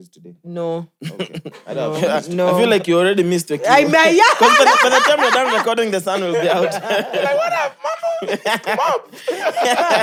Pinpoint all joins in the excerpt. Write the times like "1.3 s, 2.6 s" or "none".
none